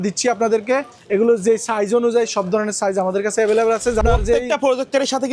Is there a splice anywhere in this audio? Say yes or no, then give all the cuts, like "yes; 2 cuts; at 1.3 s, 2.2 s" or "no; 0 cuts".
yes; 1 cut; at 4.0 s